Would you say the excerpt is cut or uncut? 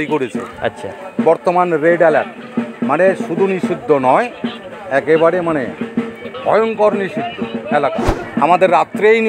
cut